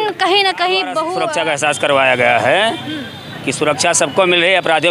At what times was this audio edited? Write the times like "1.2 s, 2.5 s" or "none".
1.1 s